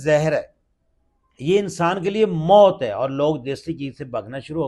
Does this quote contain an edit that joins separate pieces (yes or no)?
no